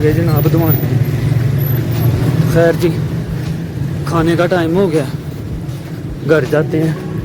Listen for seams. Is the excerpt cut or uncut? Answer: uncut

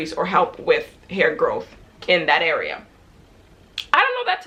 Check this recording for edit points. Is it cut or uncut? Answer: uncut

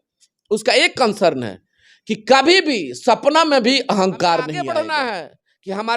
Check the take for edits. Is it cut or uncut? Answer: cut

